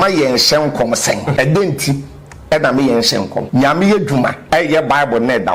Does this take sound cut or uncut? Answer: cut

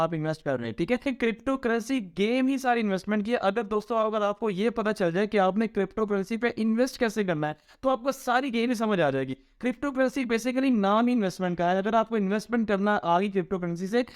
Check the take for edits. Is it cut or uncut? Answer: cut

